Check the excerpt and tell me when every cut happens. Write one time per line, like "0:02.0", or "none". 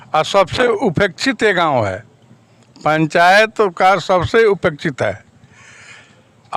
none